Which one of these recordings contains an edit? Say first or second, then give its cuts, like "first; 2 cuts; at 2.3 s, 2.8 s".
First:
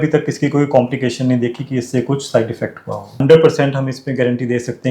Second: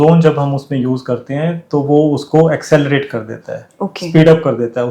first; 1 cut; at 3.1 s